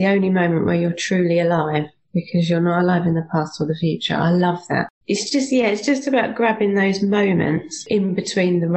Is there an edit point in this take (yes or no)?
yes